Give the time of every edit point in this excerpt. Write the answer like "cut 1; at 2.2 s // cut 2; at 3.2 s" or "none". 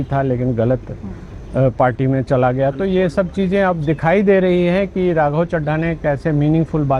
none